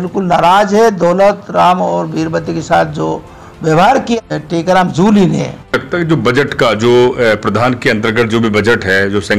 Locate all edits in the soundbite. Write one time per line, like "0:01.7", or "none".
0:04.2
0:05.7

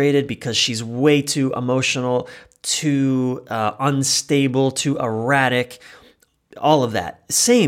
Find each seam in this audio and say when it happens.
none

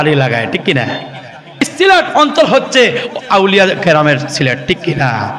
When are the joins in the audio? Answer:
0:01.7

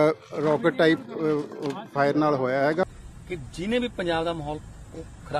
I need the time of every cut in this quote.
0:02.8

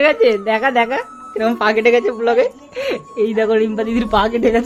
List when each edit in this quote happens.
none

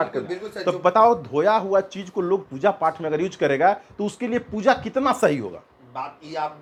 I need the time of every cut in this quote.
none

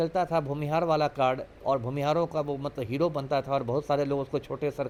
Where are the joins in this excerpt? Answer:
none

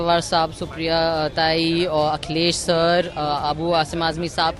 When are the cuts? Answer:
none

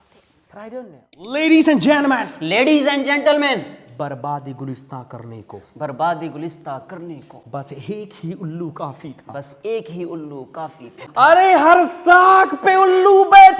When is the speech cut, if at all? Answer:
0:01.1
0:11.0

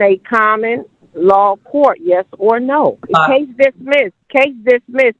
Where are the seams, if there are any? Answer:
0:03.0
0:04.2

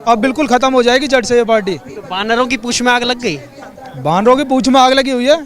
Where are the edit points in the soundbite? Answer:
none

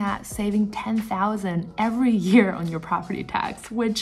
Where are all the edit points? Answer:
none

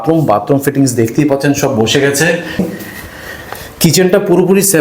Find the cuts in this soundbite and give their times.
0:02.7

